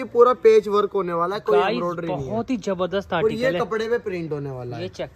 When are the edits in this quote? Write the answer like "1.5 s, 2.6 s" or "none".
none